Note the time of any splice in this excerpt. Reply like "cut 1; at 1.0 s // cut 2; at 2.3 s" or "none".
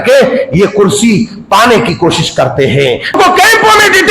cut 1; at 3.2 s